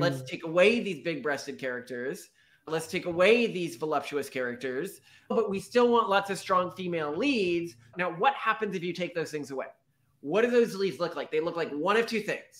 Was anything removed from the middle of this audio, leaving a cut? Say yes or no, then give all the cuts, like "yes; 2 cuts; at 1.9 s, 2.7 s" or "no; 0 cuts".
yes; 2 cuts; at 5.3 s, 7.9 s